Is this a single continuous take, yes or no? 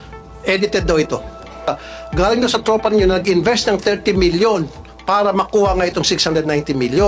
no